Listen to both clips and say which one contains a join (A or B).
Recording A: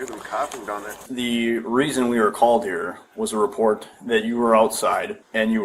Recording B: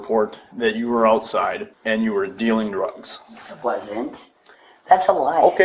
A